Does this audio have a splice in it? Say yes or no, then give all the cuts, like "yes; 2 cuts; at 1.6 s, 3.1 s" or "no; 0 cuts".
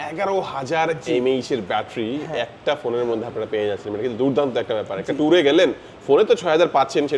no; 0 cuts